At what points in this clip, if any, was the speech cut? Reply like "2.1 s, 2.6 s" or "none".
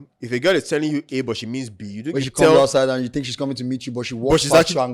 2.3 s